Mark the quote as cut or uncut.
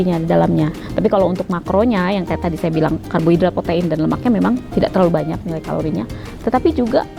uncut